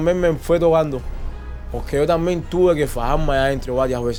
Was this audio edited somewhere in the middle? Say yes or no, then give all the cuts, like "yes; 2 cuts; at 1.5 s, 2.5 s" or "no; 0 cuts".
no; 0 cuts